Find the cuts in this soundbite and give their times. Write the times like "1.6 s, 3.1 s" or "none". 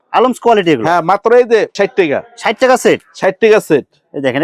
none